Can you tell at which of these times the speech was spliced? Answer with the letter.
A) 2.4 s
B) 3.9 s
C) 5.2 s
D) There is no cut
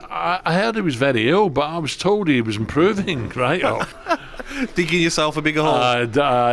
B